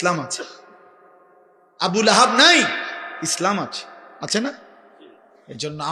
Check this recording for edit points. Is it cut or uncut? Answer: uncut